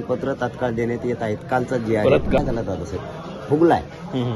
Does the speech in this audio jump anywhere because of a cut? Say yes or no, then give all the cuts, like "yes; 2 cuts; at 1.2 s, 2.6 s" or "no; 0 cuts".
yes; 1 cut; at 2.4 s